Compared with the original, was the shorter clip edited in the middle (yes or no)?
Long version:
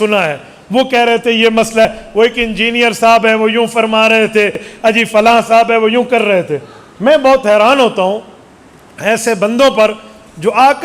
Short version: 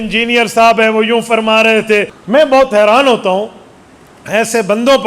yes